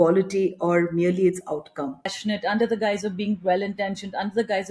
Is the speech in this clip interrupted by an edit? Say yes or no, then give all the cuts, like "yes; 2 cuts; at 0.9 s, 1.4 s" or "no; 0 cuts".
yes; 1 cut; at 2.1 s